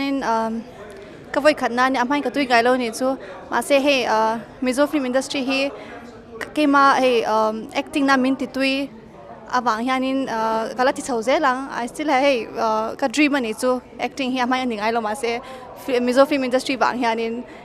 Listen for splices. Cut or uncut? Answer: uncut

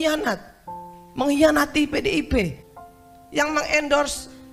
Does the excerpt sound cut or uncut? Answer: cut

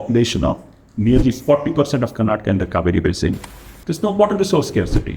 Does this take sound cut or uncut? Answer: cut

